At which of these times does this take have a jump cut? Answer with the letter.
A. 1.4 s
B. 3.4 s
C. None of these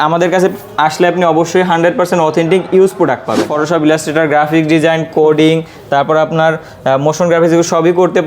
B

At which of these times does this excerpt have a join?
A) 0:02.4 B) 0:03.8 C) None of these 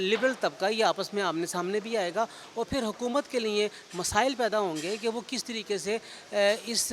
C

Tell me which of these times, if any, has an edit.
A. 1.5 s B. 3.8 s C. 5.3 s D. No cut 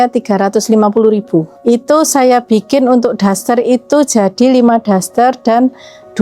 A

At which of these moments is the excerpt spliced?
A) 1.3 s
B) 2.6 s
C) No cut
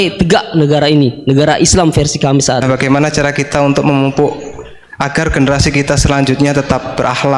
B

